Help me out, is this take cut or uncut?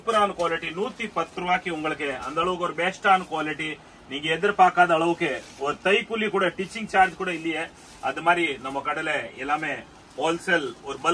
uncut